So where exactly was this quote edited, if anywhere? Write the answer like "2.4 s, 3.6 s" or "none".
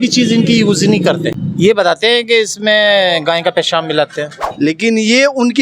1.4 s, 4.4 s